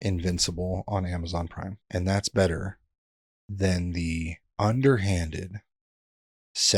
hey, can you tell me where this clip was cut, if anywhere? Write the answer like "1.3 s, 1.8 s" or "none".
1.8 s, 4.4 s